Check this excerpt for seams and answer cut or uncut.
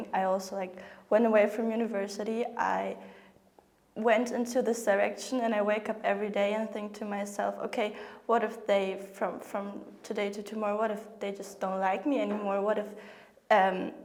uncut